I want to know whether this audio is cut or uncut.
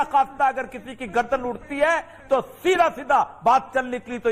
uncut